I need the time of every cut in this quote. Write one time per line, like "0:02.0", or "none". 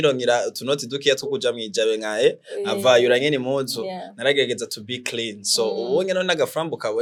none